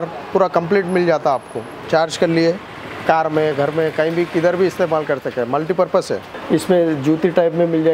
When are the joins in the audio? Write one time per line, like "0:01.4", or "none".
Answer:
0:01.8
0:06.3